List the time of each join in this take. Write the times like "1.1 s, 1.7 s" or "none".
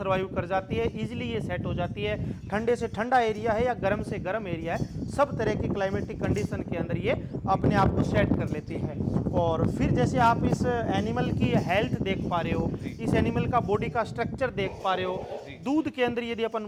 none